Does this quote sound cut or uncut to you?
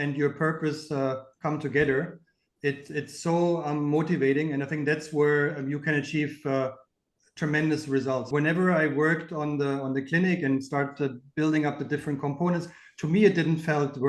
cut